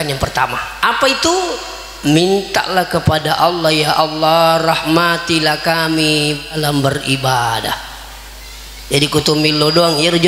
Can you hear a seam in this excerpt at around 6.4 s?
no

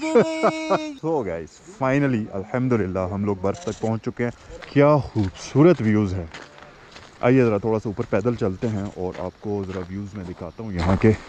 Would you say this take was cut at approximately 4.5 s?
yes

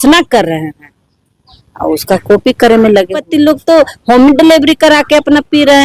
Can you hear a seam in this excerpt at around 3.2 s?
yes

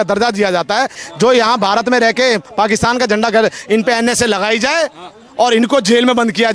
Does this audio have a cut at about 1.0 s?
yes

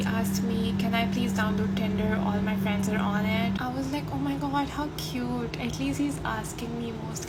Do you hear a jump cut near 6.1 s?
no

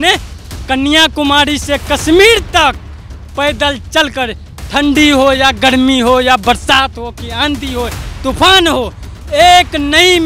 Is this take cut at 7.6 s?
no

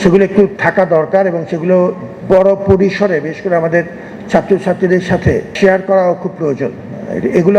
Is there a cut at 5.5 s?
yes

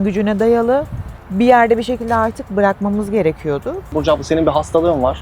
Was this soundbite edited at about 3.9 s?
yes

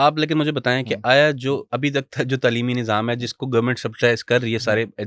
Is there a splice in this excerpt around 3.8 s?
no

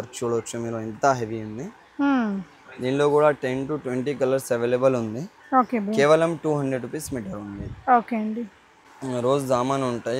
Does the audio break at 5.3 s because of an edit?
no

